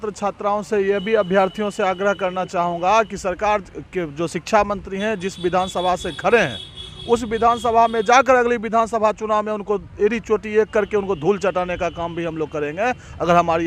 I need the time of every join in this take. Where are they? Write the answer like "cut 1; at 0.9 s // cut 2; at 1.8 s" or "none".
none